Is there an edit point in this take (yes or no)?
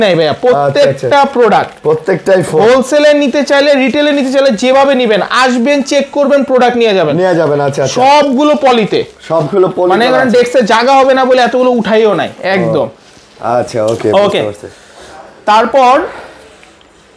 no